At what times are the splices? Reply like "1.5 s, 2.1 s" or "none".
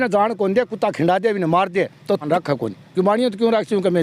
2.2 s